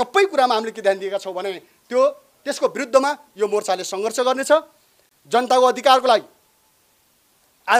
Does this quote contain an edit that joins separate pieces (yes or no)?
no